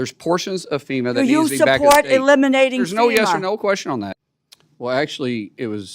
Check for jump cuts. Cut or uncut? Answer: cut